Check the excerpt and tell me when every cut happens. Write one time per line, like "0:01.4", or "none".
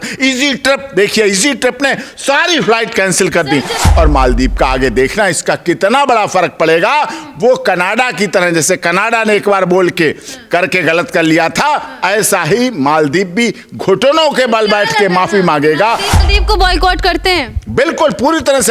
0:03.8
0:16.1